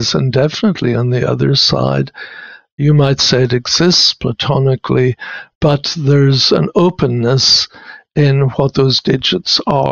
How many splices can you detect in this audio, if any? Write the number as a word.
zero